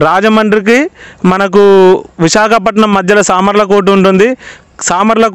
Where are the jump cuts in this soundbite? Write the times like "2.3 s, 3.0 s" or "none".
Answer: none